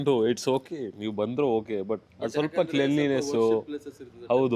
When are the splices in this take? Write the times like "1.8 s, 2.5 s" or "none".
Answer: 2.1 s